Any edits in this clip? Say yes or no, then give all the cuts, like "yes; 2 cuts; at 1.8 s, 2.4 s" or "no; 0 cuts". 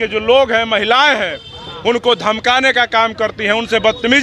no; 0 cuts